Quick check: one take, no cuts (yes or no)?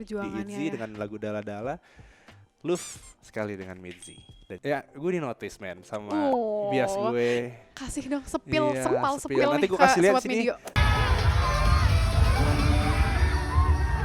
no